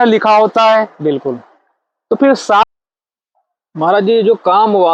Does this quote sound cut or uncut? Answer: cut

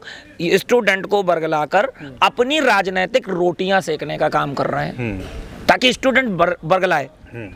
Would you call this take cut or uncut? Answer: uncut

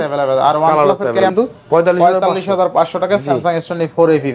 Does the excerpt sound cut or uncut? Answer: cut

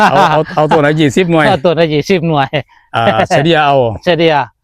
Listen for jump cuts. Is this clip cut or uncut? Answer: uncut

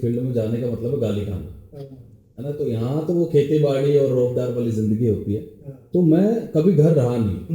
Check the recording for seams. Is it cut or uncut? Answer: uncut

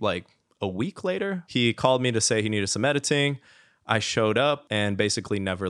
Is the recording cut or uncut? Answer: cut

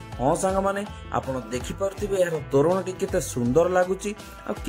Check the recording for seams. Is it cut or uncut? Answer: uncut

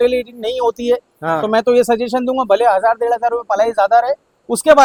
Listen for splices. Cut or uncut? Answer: uncut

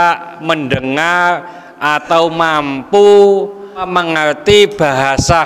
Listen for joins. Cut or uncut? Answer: cut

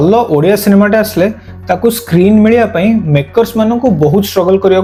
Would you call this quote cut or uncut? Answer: uncut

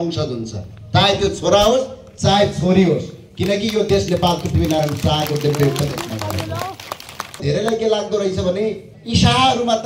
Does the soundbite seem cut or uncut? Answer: cut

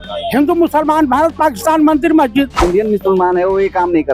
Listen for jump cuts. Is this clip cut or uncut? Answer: cut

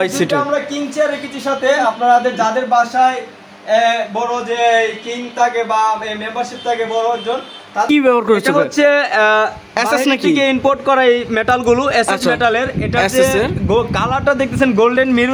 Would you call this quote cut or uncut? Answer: cut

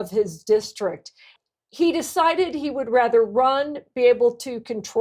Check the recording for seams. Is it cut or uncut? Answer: cut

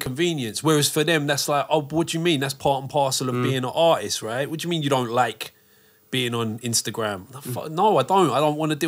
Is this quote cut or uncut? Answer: uncut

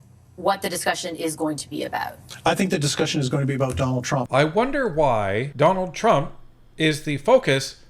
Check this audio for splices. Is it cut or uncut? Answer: cut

